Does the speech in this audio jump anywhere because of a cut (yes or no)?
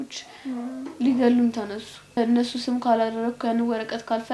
yes